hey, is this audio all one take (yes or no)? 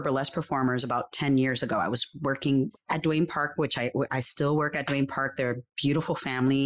no